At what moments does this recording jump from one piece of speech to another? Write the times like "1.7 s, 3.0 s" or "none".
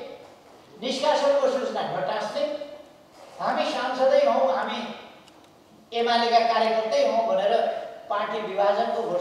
none